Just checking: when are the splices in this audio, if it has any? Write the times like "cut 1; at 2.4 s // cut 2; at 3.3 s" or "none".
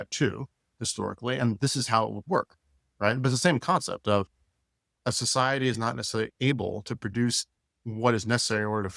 cut 1; at 6.3 s // cut 2; at 7.8 s